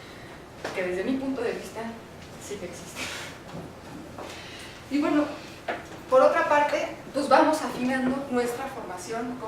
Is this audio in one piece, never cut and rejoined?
no; 1 cut; at 3.7 s

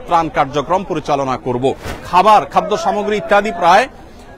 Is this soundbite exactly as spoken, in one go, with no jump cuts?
no; 1 cut; at 2.0 s

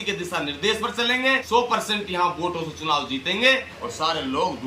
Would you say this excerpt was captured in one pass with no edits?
no; 2 cuts; at 1.4 s, 3.8 s

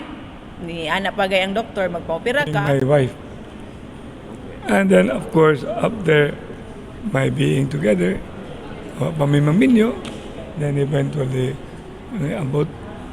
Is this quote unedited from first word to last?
no; 1 cut; at 2.8 s

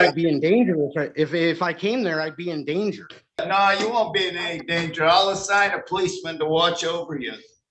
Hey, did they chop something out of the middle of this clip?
yes; 1 cut; at 3.4 s

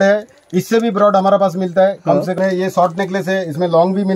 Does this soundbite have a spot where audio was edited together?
yes; 1 cut; at 2.3 s

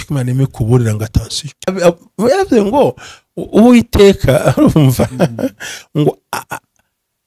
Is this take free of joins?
no; 1 cut; at 1.7 s

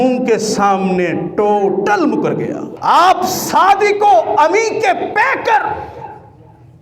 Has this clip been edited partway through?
yes; 1 cut; at 2.7 s

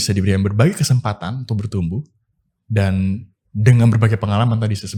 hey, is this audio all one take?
yes; 0 cuts

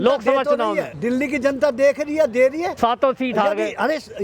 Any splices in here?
yes; 2 cuts; at 0.9 s, 2.7 s

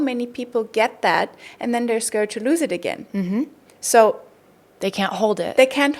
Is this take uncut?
yes; 0 cuts

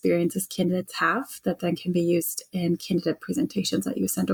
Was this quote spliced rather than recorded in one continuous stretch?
no; 0 cuts

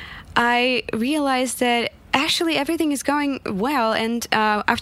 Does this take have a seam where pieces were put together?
no; 0 cuts

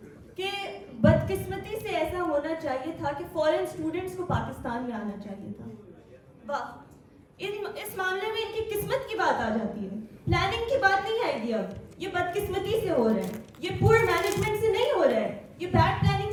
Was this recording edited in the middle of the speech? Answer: no; 0 cuts

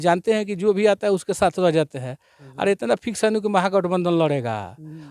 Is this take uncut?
yes; 0 cuts

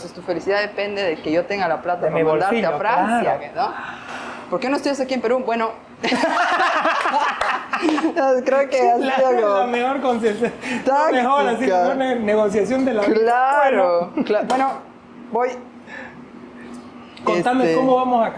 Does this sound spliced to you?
no; 0 cuts

